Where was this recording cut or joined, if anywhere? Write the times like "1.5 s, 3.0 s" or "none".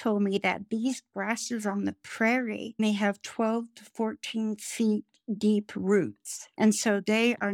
none

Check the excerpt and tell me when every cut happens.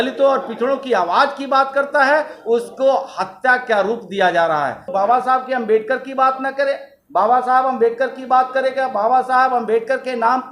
4.9 s

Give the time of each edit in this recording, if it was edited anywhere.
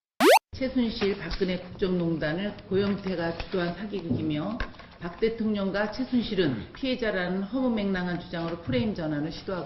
none

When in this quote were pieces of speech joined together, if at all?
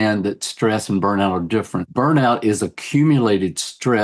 1.9 s

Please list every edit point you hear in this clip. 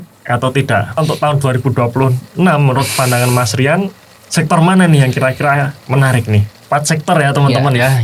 1.0 s, 6.5 s

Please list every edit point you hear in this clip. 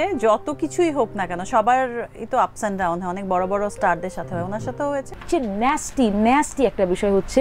5.2 s

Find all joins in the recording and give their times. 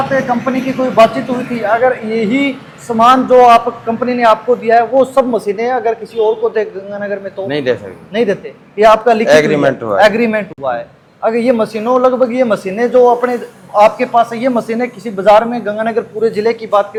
none

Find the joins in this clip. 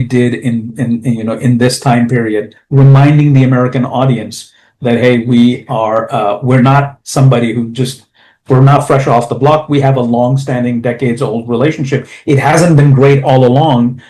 none

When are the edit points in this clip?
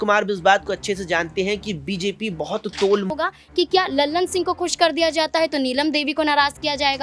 3.1 s

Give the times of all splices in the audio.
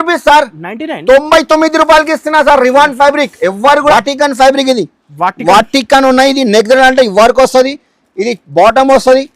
3.9 s

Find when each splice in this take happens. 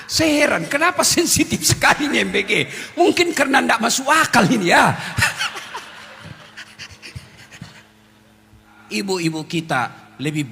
8.7 s

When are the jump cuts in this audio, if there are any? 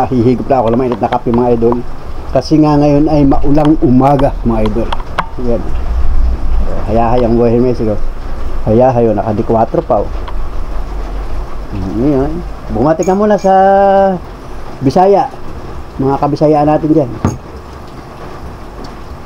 none

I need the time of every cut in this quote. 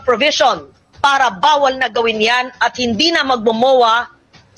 none

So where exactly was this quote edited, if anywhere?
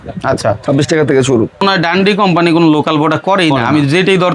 1.6 s

